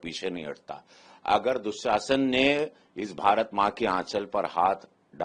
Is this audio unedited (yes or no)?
yes